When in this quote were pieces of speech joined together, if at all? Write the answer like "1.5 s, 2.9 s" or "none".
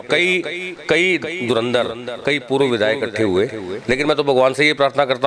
none